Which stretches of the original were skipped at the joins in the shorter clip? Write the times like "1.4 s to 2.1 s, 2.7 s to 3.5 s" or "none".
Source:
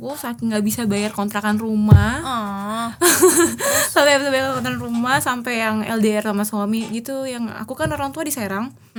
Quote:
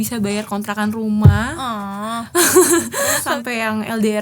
3.9 s to 5.2 s